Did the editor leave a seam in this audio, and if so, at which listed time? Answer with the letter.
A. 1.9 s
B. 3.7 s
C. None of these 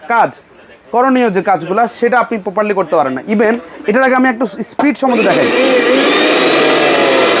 B